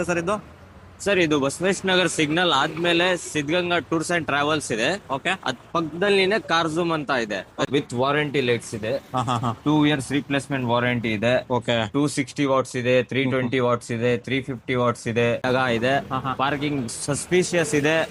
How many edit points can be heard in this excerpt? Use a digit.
2